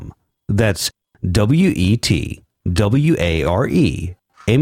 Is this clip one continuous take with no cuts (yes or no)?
yes